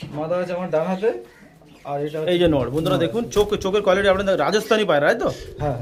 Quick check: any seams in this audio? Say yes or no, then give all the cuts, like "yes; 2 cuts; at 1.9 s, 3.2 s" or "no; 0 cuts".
no; 0 cuts